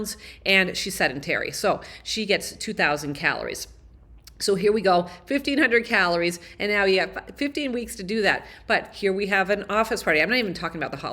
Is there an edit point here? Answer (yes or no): no